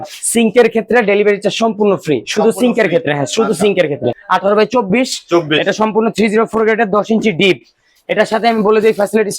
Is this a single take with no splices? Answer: no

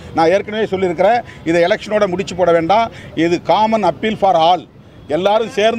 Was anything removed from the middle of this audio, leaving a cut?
no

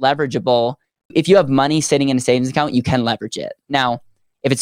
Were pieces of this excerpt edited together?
yes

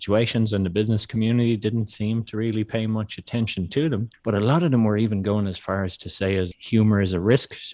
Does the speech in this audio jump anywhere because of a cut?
yes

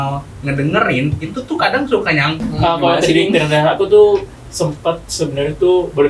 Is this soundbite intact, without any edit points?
no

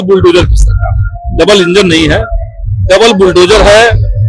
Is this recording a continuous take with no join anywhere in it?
yes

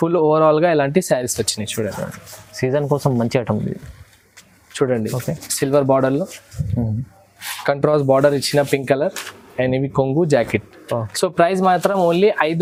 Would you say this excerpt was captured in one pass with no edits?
yes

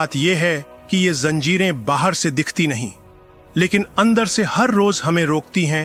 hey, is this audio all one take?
yes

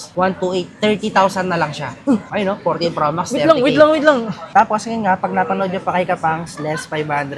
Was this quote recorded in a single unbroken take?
no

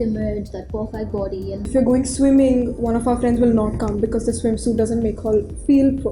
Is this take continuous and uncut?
no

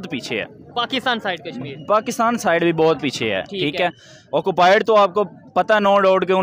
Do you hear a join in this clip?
no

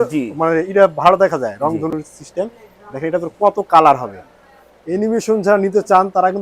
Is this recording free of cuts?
yes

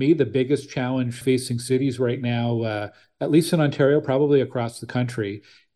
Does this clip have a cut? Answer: yes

